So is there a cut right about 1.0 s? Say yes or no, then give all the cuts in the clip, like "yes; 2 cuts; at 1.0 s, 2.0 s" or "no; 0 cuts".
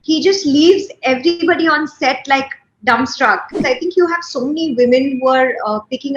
no; 1 cut; at 3.5 s